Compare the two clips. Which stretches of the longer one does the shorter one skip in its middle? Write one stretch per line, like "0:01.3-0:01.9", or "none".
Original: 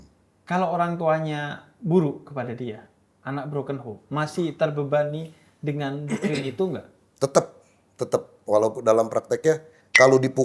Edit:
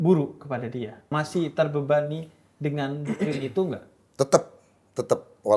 0:02.8-0:04.0